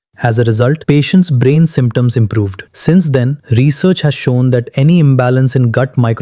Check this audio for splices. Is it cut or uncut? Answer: cut